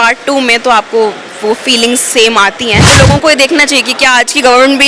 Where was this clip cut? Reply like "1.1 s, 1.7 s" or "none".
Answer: 2.9 s